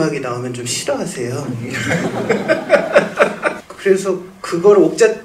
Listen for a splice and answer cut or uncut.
cut